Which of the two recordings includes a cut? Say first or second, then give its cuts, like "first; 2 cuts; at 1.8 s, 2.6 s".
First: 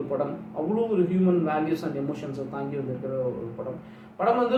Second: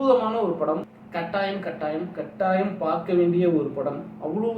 second; 1 cut; at 1.0 s